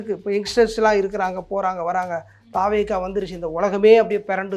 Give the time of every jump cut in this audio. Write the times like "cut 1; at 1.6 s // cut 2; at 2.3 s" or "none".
none